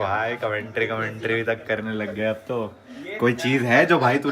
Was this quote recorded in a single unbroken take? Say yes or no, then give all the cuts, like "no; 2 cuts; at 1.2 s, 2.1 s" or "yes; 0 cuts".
yes; 0 cuts